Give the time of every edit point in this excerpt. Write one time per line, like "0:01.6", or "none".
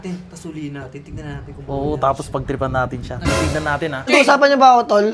0:04.1